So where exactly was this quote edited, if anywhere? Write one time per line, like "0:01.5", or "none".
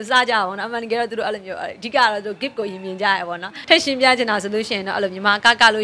0:03.5